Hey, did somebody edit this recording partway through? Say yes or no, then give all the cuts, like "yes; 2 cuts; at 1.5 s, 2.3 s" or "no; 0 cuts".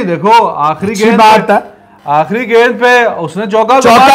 no; 0 cuts